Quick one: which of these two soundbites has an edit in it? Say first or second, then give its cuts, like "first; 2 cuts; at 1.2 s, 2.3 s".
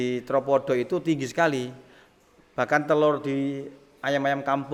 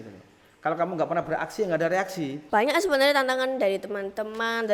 second; 1 cut; at 2.4 s